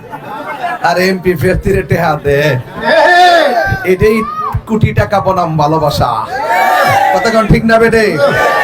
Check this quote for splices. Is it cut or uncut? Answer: uncut